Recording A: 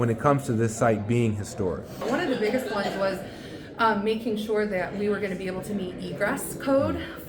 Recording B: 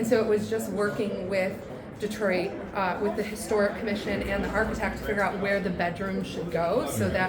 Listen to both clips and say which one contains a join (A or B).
A